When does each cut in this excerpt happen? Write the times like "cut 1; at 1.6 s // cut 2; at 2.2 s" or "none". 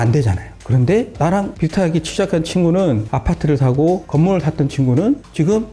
cut 1; at 3.0 s

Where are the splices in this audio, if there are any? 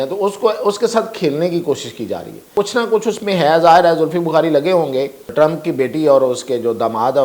cut 1; at 2.5 s // cut 2; at 5.2 s

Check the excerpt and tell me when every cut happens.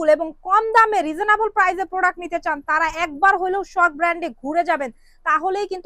none

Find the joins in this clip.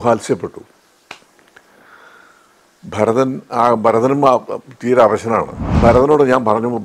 cut 1; at 5.8 s

